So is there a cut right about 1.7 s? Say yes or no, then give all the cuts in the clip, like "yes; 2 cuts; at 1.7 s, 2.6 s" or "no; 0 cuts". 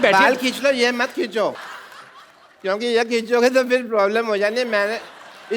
yes; 1 cut; at 1.7 s